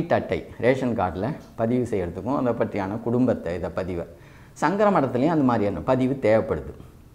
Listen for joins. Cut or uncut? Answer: uncut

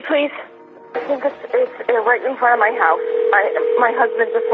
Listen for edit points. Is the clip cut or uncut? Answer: cut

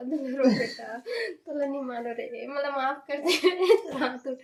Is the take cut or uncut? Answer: uncut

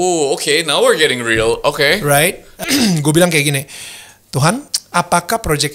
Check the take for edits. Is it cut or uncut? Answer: cut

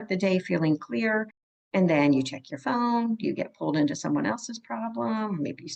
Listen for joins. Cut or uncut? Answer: uncut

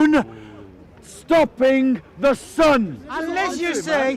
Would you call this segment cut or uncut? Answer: cut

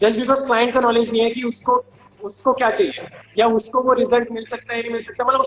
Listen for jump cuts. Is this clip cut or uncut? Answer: uncut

